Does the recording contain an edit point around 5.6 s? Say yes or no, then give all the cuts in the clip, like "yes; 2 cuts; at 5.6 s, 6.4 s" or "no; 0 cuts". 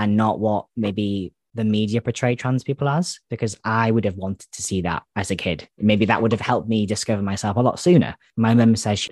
no; 1 cut; at 8.2 s